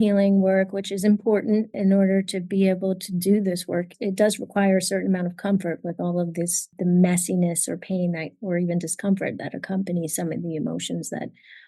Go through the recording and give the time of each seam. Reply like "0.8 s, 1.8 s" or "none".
1.7 s, 3.9 s, 6.7 s